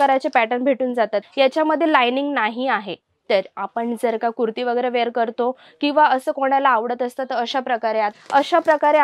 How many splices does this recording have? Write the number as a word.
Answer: two